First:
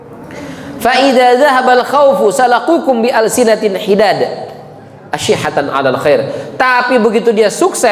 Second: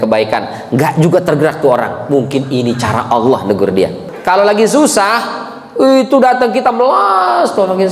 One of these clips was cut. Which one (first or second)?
second